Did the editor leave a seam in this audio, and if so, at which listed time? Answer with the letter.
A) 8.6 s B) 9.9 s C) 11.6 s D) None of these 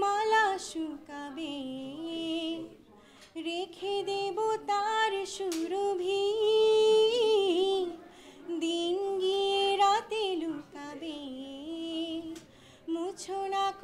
D